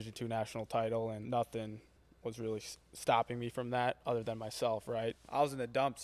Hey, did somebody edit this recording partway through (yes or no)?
yes